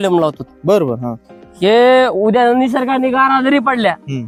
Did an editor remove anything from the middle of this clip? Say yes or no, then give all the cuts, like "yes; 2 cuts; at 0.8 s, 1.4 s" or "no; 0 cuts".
no; 0 cuts